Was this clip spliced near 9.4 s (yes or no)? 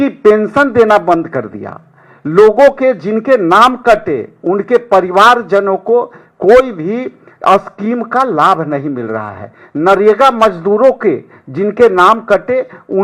no